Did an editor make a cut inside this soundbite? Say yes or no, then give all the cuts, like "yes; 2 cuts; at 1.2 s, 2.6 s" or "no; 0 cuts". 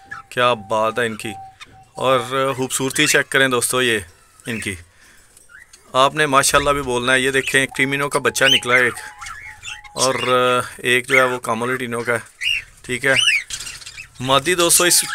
no; 0 cuts